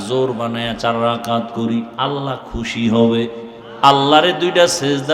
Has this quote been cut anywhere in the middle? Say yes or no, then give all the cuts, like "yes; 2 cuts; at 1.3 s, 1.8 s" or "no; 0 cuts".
yes; 1 cut; at 1.9 s